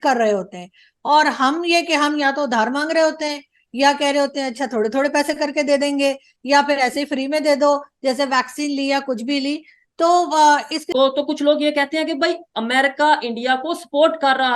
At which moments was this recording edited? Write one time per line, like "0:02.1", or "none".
0:10.9